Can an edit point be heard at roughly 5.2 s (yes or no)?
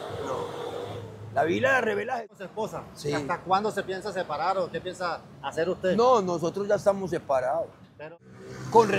no